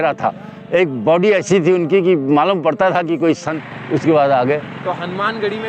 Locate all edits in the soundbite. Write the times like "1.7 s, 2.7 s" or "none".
3.5 s